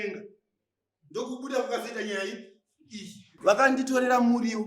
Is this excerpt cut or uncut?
cut